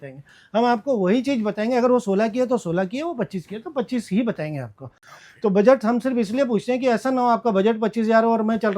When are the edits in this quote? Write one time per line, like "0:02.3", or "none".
none